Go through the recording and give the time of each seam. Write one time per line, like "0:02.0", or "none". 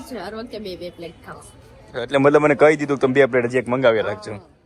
none